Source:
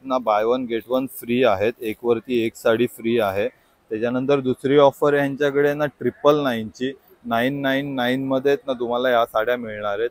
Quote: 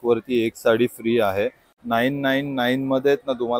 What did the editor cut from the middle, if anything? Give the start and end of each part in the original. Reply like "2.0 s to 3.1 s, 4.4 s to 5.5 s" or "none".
3.7 s to 7.1 s